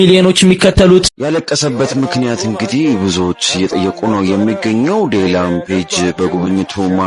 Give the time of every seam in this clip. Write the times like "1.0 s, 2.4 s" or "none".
1.1 s